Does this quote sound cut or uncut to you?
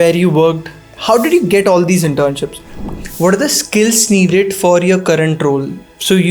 cut